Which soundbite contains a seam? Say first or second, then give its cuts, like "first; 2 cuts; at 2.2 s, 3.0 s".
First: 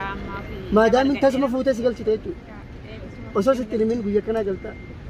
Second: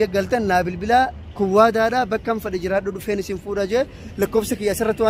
second; 1 cut; at 1.2 s